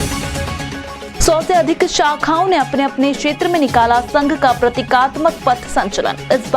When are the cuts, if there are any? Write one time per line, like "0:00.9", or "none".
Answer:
0:01.1

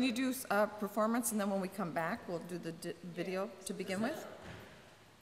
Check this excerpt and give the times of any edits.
0:02.6

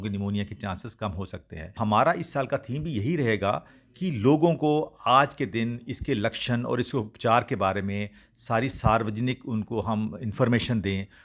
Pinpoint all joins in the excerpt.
0:01.7

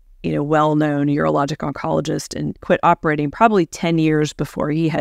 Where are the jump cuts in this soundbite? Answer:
0:02.6

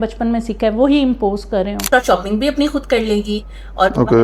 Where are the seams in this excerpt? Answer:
0:01.8

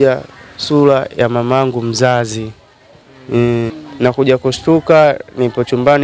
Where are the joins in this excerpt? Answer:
0:03.8

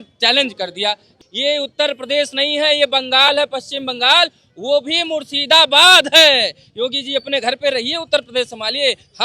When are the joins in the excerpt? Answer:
0:01.1

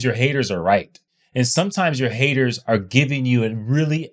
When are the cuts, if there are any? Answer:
0:01.0

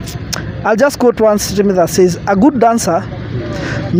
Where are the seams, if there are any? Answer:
none

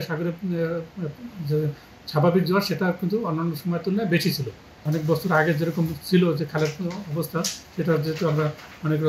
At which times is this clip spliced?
0:04.7

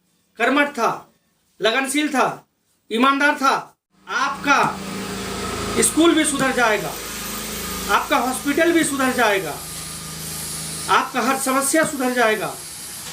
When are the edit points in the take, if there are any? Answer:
0:04.2

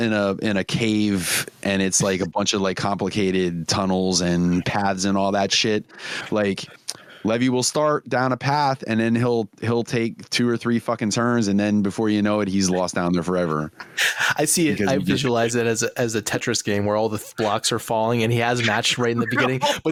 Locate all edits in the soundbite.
none

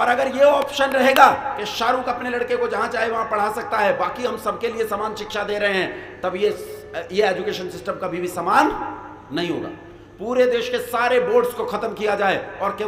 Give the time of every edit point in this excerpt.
none

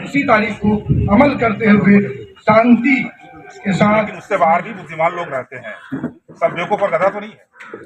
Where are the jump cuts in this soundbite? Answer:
0:04.2

